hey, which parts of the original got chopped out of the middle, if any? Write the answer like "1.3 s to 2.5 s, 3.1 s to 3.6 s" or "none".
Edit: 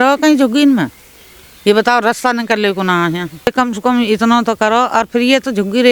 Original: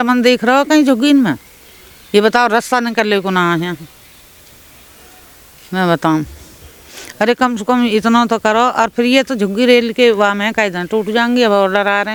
3.9 s to 7.3 s